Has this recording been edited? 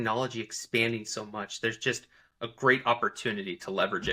no; 0 cuts

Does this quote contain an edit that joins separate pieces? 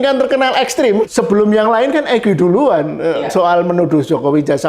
yes; 1 cut; at 1.1 s

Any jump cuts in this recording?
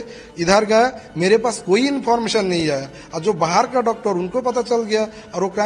no; 0 cuts

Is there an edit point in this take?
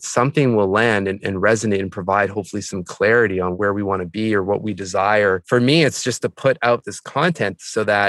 yes; 3 cuts; at 3.5 s, 5.4 s, 7.0 s

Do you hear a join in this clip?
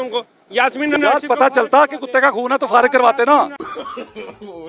yes; 1 cut; at 0.9 s

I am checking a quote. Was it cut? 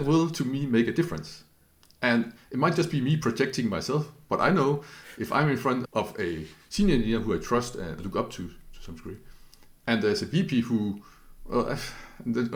no; 0 cuts

